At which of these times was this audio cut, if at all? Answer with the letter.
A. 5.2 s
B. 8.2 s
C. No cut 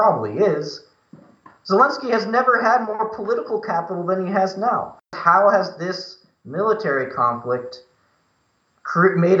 A